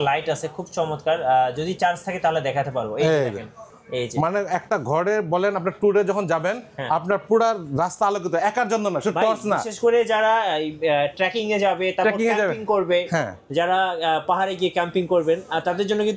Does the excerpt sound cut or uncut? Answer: uncut